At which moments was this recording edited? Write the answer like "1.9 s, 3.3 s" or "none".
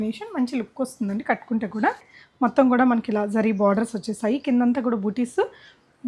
2.1 s